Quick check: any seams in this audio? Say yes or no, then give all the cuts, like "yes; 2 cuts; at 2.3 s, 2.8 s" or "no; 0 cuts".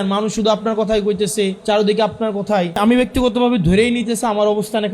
yes; 2 cuts; at 1.6 s, 2.8 s